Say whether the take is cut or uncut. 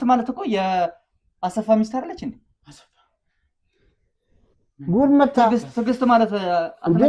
uncut